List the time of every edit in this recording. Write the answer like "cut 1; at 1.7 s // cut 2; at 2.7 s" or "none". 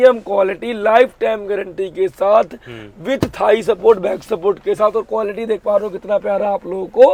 none